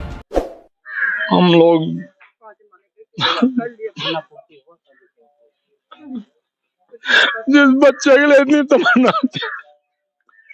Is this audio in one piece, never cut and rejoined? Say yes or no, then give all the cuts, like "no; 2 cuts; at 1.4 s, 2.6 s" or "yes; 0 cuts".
yes; 0 cuts